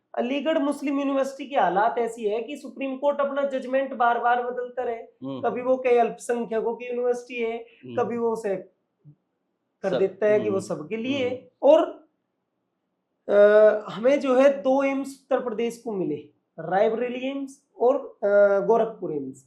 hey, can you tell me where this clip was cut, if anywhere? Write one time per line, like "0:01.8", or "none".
0:11.5